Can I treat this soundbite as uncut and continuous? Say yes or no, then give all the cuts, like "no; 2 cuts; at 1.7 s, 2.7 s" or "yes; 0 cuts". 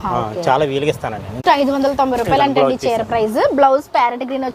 no; 1 cut; at 1.4 s